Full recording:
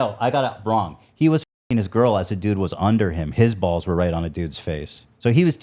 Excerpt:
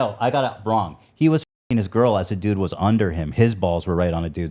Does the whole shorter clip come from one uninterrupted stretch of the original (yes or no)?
yes